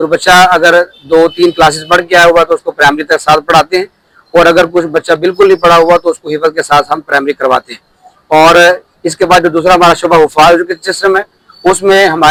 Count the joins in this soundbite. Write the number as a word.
zero